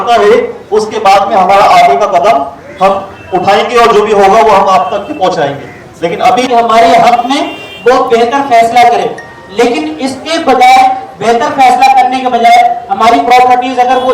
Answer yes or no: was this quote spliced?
yes